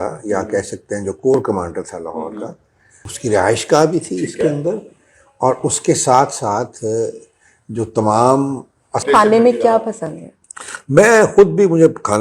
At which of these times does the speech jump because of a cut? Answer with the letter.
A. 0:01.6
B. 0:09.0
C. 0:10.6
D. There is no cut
B